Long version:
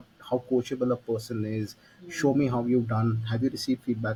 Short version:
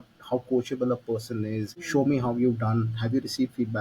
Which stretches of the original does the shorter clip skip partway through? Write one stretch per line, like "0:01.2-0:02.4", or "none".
0:01.7-0:02.0